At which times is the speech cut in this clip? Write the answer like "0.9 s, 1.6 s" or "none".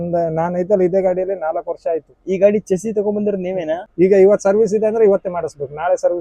3.9 s